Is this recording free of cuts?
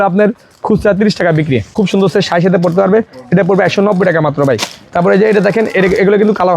no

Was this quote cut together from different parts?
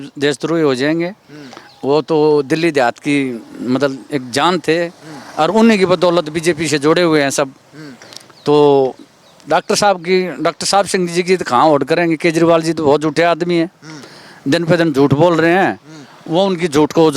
no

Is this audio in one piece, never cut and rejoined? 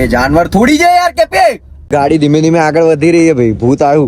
no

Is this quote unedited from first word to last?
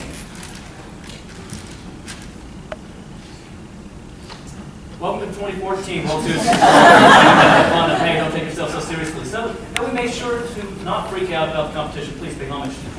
no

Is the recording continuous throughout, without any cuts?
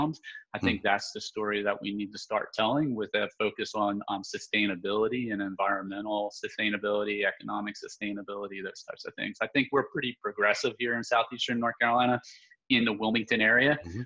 yes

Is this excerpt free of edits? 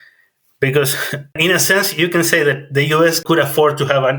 no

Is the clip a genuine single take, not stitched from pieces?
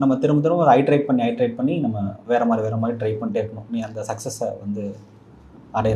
yes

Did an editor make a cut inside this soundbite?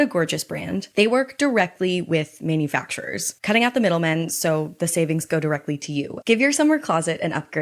yes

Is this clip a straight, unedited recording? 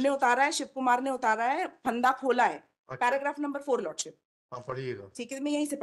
yes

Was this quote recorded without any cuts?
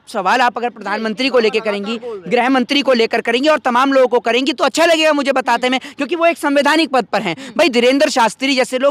yes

